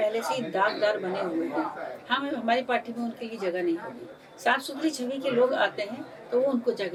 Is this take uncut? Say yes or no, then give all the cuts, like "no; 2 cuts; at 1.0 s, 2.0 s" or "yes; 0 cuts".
yes; 0 cuts